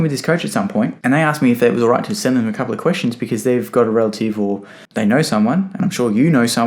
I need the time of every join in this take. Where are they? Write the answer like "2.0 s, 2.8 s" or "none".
1.0 s